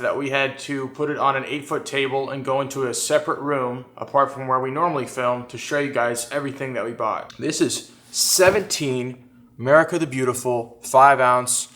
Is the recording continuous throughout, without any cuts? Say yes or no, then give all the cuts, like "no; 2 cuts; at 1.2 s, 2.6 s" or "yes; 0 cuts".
no; 1 cut; at 7.3 s